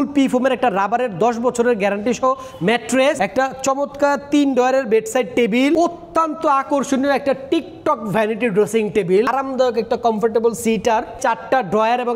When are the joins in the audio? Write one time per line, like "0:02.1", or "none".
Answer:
0:03.2
0:05.8
0:09.3
0:11.1